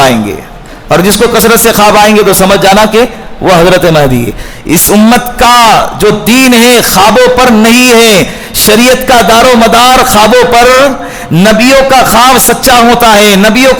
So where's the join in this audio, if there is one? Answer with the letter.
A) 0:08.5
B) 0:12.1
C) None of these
C